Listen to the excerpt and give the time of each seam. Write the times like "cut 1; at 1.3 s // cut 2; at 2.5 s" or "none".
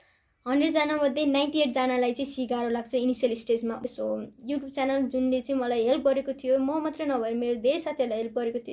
cut 1; at 3.9 s